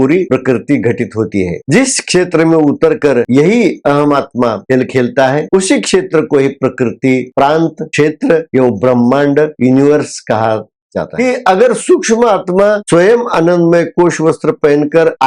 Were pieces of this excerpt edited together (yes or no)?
yes